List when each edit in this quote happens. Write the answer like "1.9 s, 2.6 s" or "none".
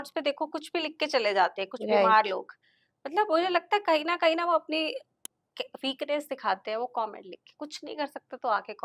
none

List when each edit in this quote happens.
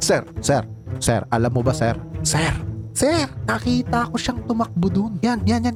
none

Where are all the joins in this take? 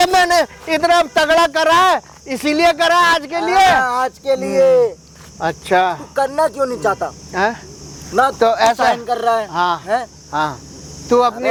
none

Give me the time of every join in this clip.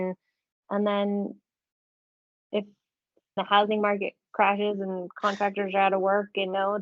3.4 s

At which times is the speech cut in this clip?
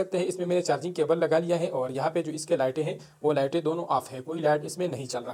none

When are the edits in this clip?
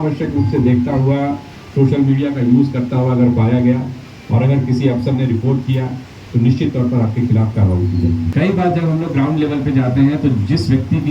8.3 s

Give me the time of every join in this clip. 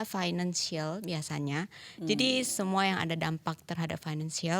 none

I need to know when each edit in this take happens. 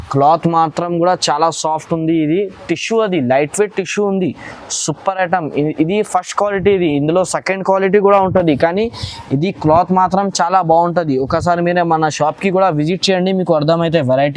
none

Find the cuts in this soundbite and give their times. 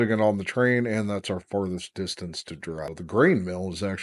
2.9 s

